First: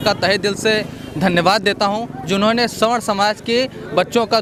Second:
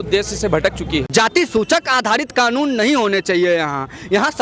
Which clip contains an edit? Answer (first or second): second